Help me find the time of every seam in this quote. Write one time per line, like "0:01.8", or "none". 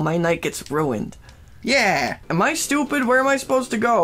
0:02.2